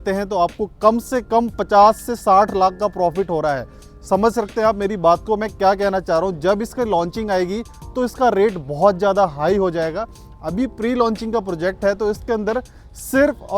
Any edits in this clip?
no; 0 cuts

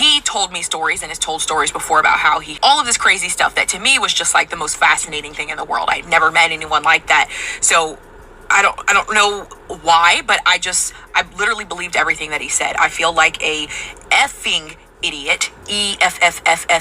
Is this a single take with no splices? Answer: no; 1 cut; at 2.6 s

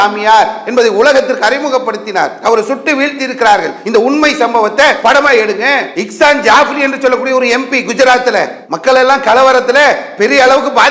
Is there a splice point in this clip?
no; 0 cuts

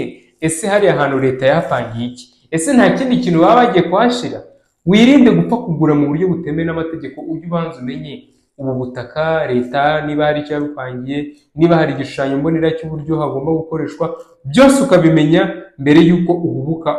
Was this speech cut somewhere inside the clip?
no; 0 cuts

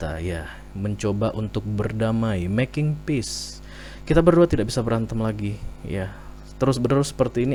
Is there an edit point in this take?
no; 0 cuts

